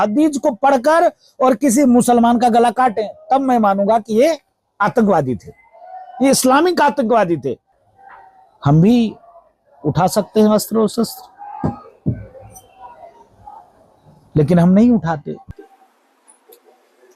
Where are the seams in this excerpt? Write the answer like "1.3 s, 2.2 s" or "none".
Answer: 7.7 s